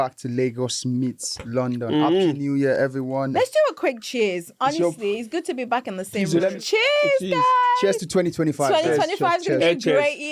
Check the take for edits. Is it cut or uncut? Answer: cut